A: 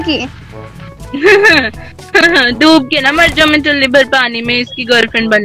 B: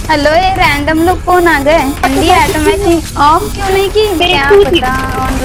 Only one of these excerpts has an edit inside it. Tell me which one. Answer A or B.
B